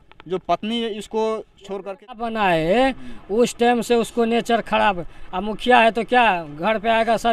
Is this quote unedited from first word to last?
no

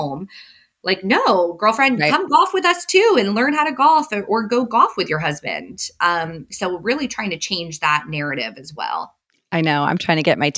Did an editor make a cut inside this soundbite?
no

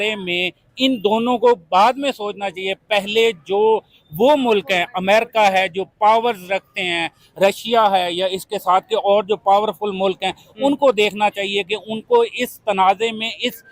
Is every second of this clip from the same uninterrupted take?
yes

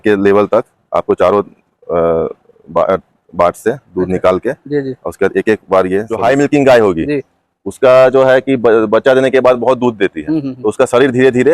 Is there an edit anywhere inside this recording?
yes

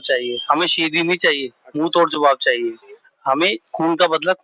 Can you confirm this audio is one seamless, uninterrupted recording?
no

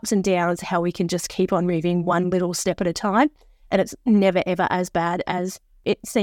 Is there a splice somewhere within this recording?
no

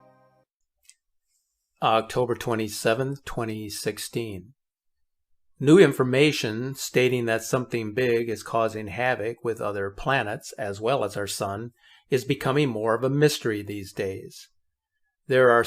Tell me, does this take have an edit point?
yes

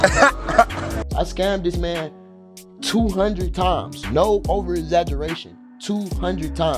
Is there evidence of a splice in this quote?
yes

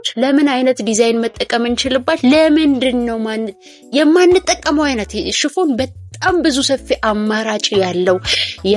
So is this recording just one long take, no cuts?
yes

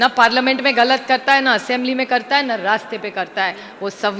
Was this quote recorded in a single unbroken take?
yes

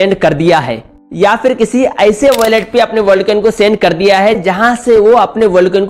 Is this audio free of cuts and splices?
yes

